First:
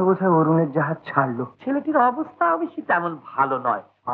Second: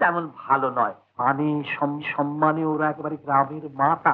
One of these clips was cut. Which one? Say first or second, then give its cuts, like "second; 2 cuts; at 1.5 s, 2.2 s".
first; 1 cut; at 1.5 s